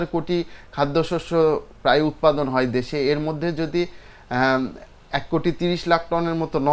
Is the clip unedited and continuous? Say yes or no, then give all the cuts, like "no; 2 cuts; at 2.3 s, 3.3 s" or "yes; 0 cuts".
yes; 0 cuts